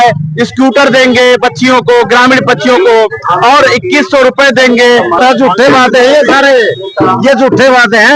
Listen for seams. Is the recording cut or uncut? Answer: cut